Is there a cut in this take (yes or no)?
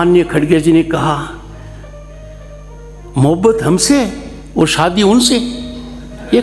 no